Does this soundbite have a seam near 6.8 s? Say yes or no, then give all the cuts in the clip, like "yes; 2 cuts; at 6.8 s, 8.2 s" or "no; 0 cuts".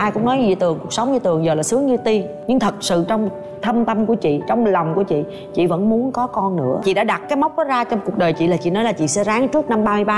yes; 1 cut; at 6.8 s